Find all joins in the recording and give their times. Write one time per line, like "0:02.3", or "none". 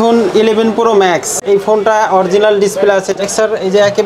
0:01.3
0:03.1